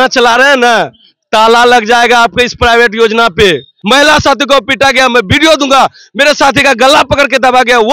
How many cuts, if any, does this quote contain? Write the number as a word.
one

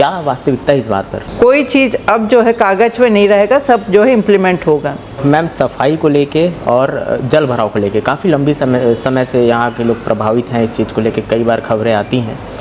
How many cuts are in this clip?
two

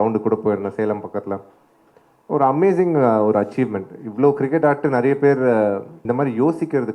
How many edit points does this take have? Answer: one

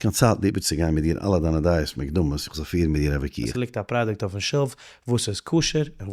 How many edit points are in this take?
one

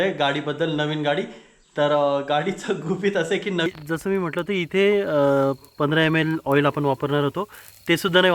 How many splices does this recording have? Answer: one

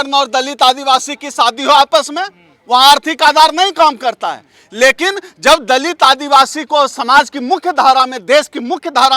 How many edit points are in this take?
zero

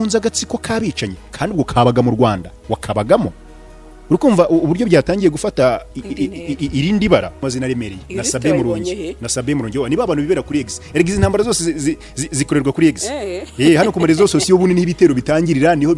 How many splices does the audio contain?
one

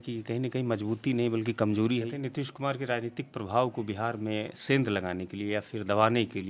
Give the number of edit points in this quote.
one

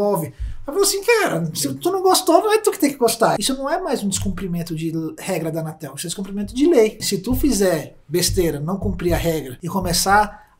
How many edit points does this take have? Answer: three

